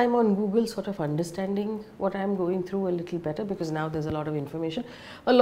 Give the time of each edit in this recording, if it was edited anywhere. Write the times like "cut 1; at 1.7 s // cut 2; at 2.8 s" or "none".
none